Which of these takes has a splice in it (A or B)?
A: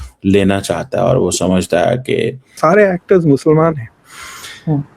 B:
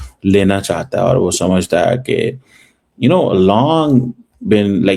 A